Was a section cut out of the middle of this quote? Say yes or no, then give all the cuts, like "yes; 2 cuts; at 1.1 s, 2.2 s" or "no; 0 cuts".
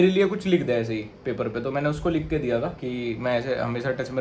yes; 1 cut; at 2.7 s